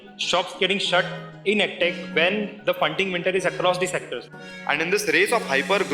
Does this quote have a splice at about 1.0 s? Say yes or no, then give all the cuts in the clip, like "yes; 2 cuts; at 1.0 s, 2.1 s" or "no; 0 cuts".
no; 1 cut; at 4.2 s